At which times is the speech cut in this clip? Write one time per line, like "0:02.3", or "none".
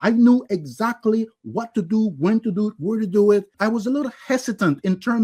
0:03.5